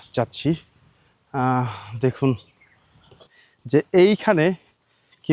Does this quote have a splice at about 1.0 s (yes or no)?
no